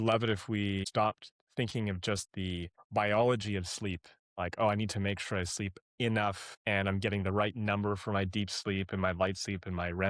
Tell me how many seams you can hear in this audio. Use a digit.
3